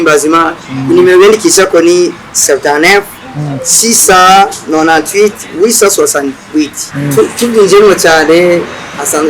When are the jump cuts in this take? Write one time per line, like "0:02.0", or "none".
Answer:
0:06.8